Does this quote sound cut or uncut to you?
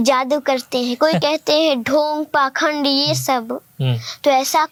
uncut